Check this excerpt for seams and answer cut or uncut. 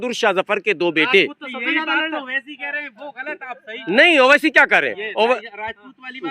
uncut